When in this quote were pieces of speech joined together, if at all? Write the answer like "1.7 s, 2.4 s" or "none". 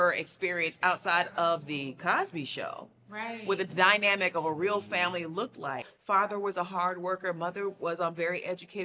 5.9 s